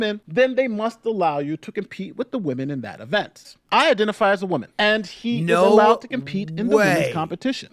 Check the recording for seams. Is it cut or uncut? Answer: cut